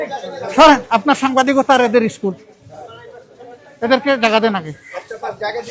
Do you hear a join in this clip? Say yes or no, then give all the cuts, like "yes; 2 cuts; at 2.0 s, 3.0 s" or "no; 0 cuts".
no; 0 cuts